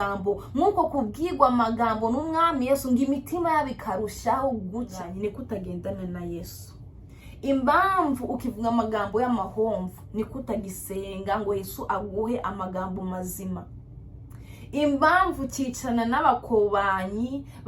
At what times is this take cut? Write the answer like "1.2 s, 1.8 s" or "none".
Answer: 5.0 s